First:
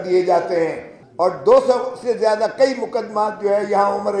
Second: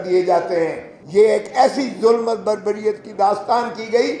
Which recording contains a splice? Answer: second; 1 cut; at 1.0 s

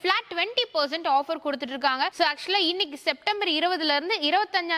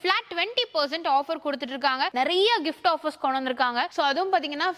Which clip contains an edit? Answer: second; 1 cut; at 2.1 s

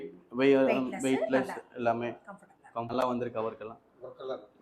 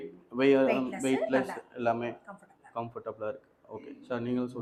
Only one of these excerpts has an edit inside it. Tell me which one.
first; 1 cut; at 2.9 s

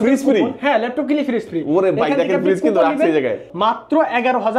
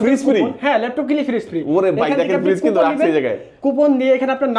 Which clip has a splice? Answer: first; 1 cut; at 3.5 s

